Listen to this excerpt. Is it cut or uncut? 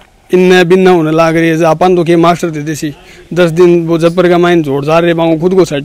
uncut